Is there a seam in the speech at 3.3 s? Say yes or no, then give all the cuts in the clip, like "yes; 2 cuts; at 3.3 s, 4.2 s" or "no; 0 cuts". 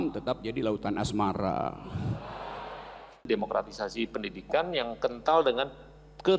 yes; 1 cut; at 3.3 s